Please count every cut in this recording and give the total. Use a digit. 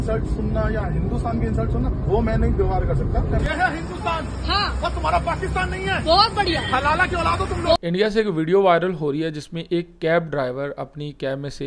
2